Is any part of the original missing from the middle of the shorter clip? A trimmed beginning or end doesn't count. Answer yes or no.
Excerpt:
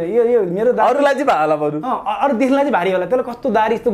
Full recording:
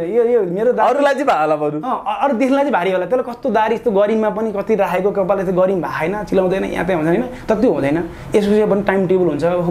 no